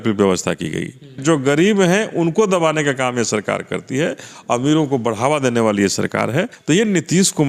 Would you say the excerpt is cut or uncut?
cut